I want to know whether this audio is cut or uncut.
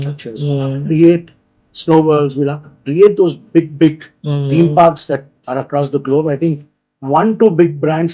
uncut